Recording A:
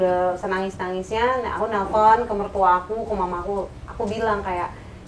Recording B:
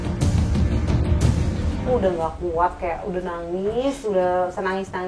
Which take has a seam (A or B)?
B